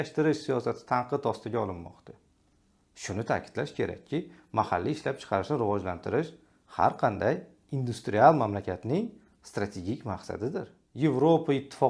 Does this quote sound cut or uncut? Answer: cut